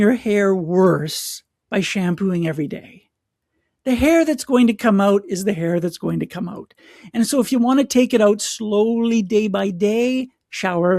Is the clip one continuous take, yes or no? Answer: yes